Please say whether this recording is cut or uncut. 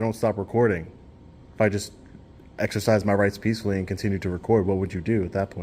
uncut